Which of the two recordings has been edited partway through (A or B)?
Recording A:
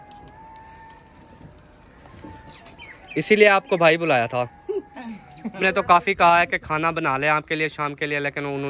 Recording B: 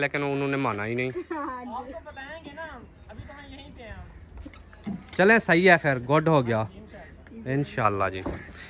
A